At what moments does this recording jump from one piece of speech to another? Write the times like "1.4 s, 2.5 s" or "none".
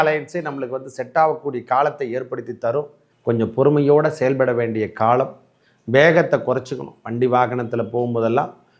3.0 s

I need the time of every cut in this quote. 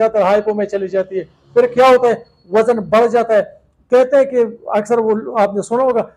none

